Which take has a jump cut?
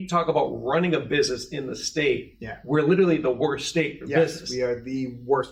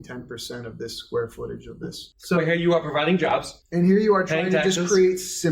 second; 2 cuts; at 2.1 s, 3.6 s

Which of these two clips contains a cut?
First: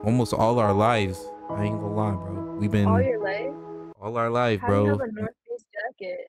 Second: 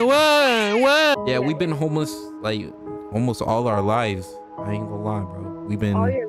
second; 1 cut; at 1.1 s

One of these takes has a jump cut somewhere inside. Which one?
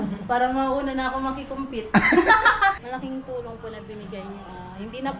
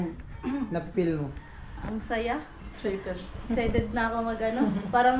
first; 1 cut; at 2.9 s

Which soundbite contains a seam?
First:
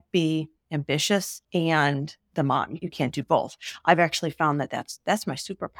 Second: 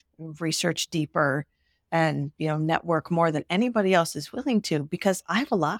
first; 2 cuts; at 1.4 s, 2.8 s

